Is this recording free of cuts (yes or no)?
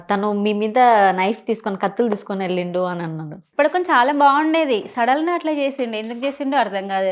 no